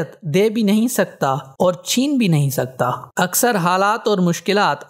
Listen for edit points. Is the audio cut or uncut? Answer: uncut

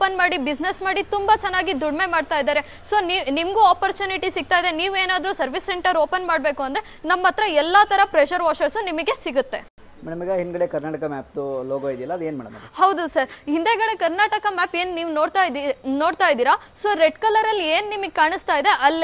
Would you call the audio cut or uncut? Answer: uncut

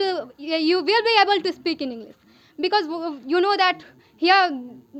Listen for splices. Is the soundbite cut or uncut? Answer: uncut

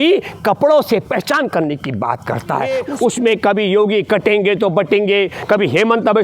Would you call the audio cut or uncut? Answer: cut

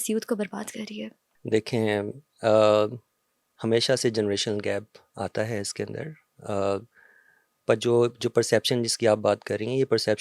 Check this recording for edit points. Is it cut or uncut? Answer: uncut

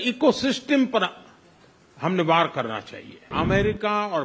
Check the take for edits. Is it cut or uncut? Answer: cut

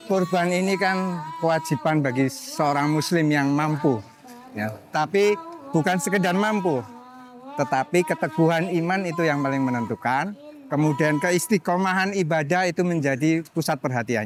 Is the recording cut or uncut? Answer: uncut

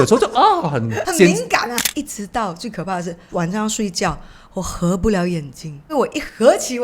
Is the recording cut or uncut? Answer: cut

